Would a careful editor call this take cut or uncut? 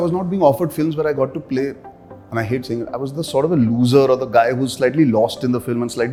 uncut